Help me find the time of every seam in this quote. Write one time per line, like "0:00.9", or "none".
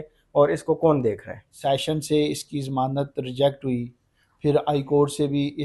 0:01.5

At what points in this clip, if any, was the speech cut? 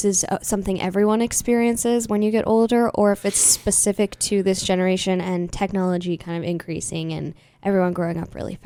none

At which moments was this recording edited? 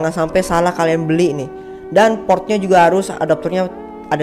none

